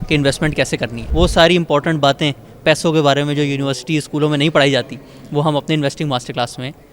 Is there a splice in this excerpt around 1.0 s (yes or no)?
yes